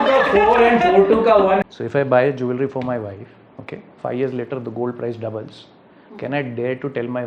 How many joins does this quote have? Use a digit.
1